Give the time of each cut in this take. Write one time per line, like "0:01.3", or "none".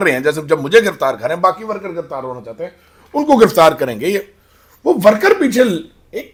none